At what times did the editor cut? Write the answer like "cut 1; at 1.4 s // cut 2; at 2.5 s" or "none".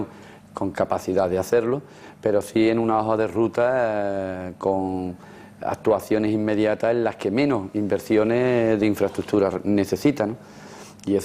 cut 1; at 3.8 s

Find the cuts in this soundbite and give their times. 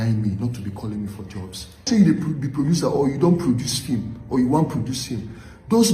cut 1; at 1.8 s

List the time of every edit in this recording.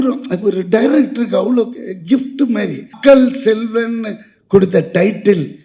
cut 1; at 2.9 s

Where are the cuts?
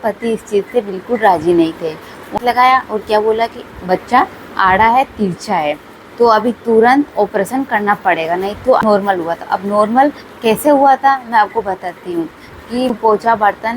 cut 1; at 2.4 s // cut 2; at 8.8 s // cut 3; at 13.0 s

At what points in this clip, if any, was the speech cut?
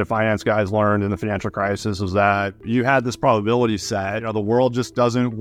cut 1; at 2.6 s // cut 2; at 4.3 s

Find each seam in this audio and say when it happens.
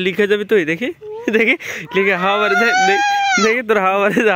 none

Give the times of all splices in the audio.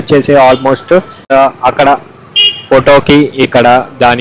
cut 1; at 1.2 s

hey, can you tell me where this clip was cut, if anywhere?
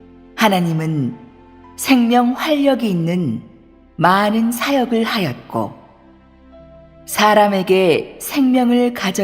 cut 1; at 7.7 s

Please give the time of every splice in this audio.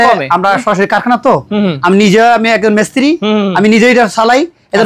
none

